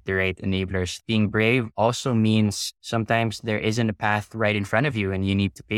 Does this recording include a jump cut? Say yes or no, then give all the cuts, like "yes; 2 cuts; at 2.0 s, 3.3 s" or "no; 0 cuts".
yes; 1 cut; at 1.0 s